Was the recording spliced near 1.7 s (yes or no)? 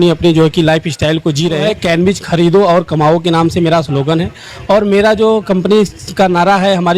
yes